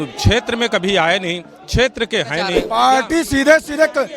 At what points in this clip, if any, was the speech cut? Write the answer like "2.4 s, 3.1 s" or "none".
2.6 s